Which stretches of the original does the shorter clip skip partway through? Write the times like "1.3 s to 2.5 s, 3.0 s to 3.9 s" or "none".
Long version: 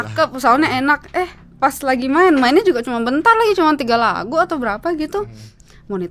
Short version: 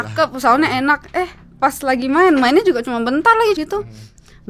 3.6 s to 5.0 s